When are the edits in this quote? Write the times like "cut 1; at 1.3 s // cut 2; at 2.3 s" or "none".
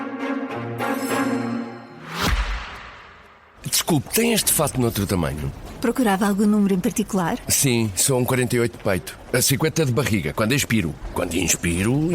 cut 1; at 1.9 s